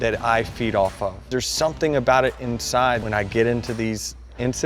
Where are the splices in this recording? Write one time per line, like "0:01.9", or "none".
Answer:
0:01.2
0:03.0